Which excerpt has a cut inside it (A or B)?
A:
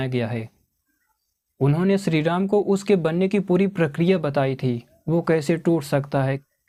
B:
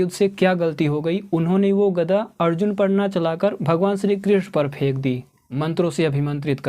B